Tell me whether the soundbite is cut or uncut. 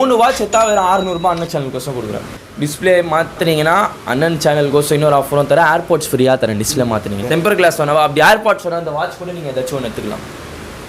cut